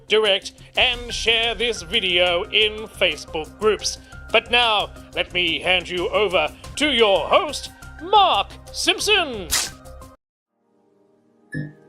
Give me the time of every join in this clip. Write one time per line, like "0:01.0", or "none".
0:10.1